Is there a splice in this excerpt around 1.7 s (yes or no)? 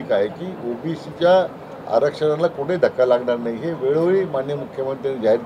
no